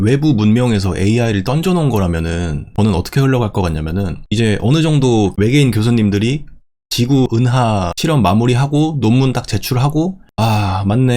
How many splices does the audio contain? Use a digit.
2